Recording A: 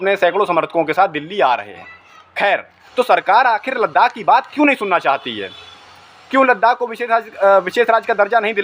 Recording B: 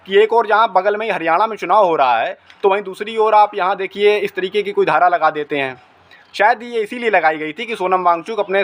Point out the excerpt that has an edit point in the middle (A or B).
A